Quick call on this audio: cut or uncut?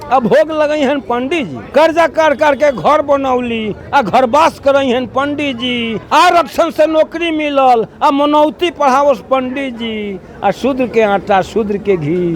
cut